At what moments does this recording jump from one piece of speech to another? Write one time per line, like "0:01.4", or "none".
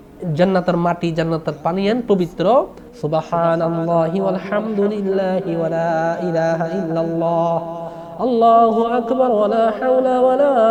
none